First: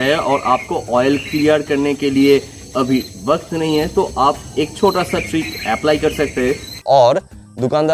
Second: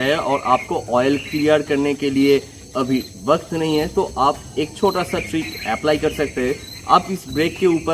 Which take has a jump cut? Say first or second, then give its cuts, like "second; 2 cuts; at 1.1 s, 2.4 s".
first; 1 cut; at 6.7 s